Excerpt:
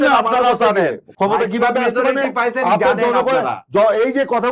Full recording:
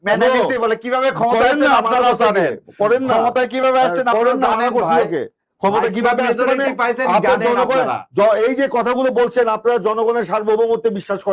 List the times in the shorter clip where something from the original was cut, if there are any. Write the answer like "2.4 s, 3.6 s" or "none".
1.0 s